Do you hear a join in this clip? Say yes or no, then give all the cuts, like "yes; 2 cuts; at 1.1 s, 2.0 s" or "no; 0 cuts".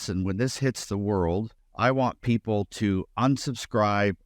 yes; 1 cut; at 1.6 s